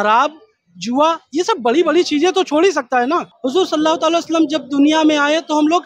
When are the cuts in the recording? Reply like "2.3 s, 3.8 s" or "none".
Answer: 3.3 s